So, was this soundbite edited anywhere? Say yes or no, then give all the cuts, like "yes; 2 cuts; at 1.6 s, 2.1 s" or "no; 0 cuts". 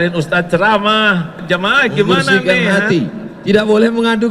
yes; 1 cut; at 1.4 s